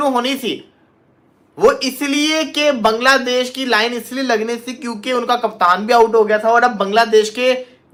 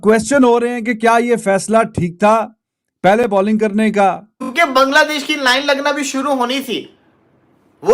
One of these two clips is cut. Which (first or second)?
second